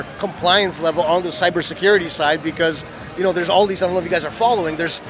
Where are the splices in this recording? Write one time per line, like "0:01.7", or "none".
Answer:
none